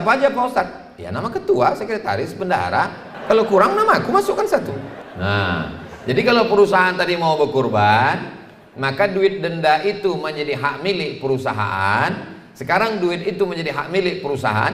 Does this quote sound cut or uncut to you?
cut